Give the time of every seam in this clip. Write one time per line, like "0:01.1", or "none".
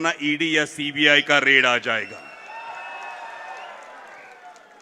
none